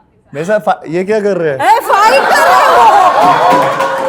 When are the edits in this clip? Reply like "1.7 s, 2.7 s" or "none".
none